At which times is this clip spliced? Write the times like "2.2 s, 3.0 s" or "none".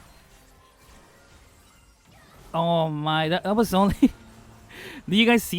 none